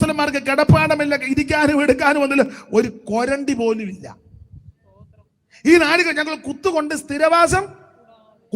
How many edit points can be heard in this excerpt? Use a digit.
0